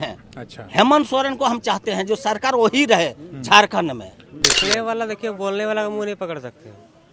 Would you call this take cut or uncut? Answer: cut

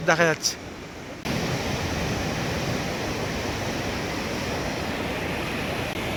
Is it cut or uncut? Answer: uncut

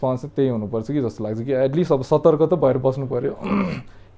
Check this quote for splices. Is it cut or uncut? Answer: uncut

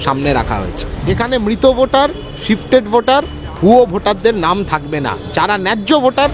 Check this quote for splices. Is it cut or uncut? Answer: cut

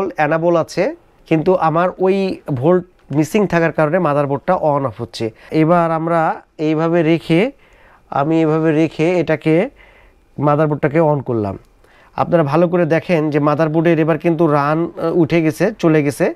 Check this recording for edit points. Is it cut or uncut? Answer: cut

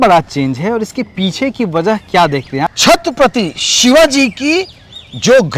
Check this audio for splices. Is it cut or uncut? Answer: cut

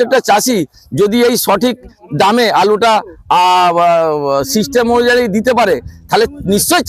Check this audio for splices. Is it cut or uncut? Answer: uncut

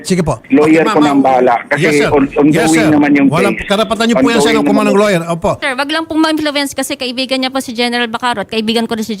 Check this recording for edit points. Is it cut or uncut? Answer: cut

